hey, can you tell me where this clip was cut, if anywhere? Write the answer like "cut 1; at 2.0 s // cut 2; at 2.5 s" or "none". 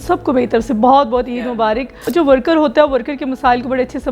cut 1; at 1.9 s